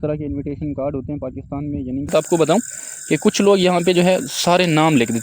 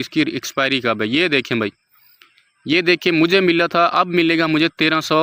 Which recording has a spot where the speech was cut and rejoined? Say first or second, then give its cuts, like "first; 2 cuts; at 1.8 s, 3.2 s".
first; 1 cut; at 2.1 s